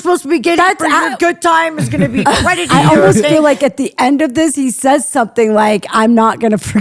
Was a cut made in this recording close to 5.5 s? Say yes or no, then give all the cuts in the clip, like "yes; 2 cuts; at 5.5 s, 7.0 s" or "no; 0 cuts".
no; 1 cut; at 3.3 s